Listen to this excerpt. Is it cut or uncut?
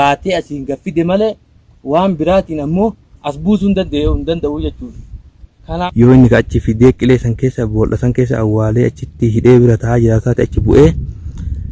cut